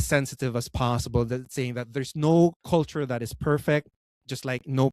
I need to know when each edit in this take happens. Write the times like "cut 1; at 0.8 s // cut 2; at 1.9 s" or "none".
cut 1; at 2.6 s